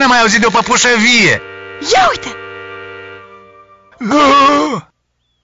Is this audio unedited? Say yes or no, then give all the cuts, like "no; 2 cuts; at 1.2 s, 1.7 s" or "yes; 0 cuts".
yes; 0 cuts